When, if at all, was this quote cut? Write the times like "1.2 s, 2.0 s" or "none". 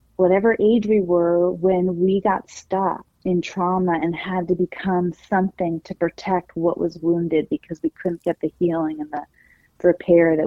3.1 s